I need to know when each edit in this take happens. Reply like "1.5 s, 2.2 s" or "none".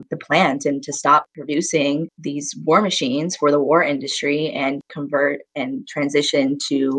none